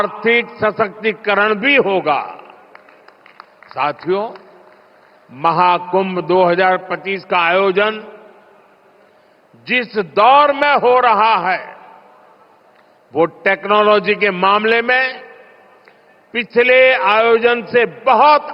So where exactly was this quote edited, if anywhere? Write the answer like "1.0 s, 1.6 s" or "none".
6.9 s